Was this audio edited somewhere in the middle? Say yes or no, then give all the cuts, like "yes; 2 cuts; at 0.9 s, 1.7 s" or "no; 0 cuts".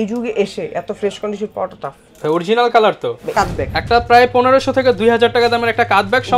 yes; 1 cut; at 3.3 s